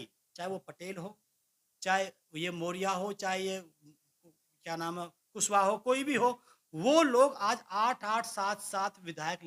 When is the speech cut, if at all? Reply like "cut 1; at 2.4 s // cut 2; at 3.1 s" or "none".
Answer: none